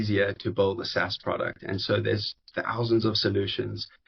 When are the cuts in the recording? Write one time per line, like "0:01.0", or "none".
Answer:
none